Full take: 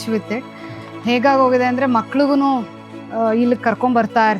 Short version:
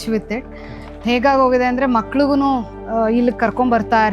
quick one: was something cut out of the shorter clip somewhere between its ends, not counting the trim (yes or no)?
yes